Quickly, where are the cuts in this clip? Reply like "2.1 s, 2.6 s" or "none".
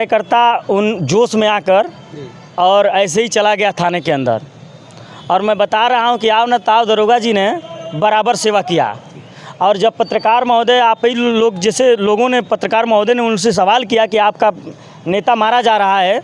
none